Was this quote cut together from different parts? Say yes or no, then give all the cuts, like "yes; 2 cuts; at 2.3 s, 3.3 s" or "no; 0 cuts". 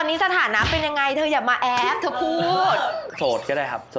yes; 1 cut; at 3.1 s